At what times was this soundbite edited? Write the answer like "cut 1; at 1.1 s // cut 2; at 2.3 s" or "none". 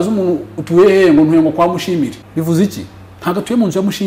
cut 1; at 2.2 s